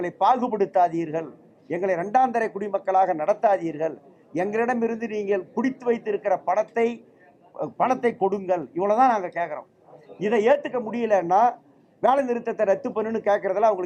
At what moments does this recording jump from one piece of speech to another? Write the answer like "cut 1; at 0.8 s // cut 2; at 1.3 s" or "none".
none